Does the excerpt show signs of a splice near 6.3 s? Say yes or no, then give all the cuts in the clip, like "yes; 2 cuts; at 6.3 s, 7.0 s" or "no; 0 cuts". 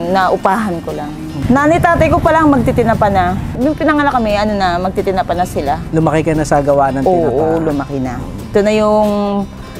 no; 1 cut; at 1.3 s